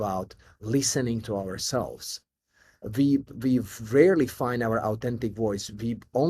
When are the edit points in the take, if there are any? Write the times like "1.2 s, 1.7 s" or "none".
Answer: none